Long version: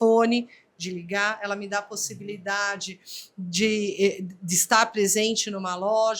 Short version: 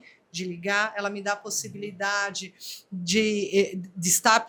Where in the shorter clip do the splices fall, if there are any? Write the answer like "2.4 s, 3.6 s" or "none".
none